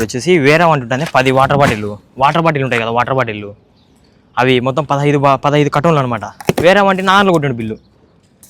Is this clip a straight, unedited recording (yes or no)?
yes